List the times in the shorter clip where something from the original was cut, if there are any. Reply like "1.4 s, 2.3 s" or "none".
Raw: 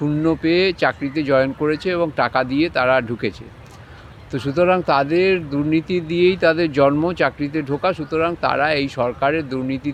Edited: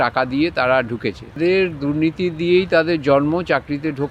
1.4 s